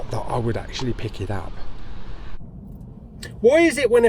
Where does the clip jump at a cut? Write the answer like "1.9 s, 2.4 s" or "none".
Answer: 2.4 s